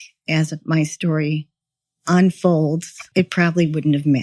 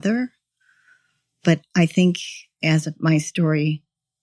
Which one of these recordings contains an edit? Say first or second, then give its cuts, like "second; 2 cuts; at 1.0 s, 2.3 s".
first; 1 cut; at 3.1 s